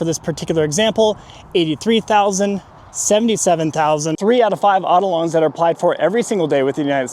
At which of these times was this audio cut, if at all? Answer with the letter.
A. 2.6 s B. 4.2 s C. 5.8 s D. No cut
B